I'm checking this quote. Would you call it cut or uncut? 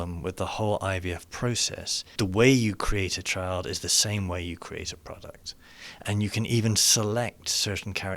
cut